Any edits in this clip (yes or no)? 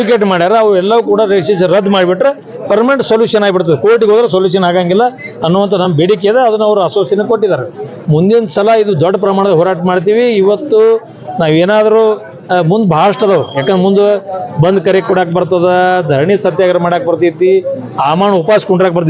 yes